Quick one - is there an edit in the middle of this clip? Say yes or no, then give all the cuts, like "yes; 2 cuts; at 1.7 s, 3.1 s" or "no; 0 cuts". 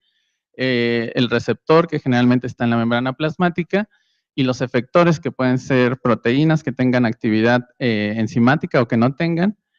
no; 0 cuts